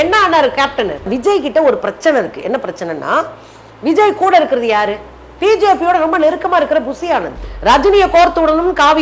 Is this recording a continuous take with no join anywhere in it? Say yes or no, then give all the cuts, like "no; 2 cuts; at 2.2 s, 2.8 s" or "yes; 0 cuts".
no; 2 cuts; at 1.1 s, 7.5 s